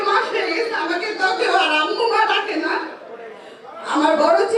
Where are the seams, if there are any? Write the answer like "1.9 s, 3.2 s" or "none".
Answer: none